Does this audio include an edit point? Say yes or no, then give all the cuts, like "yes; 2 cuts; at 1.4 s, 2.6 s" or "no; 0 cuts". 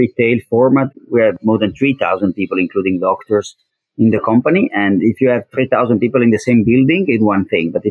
yes; 1 cut; at 0.9 s